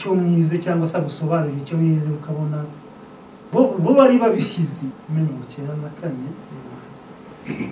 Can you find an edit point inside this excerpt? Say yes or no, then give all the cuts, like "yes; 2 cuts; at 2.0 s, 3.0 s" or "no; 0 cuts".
yes; 1 cut; at 4.8 s